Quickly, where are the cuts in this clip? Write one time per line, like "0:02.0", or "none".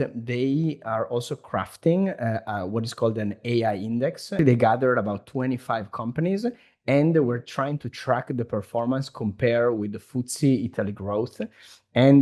0:04.4